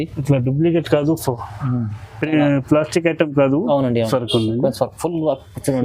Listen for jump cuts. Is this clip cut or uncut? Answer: cut